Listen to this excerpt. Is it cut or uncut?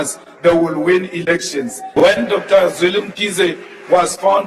cut